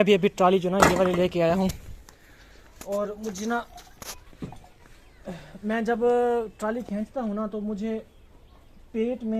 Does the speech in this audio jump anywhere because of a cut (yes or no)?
no